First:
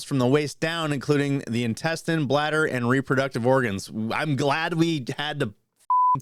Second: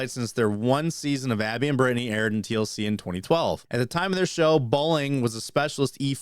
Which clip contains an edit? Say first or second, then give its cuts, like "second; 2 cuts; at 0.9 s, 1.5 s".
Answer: second; 1 cut; at 3.6 s